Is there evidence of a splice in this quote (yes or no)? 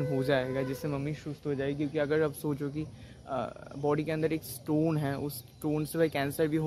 no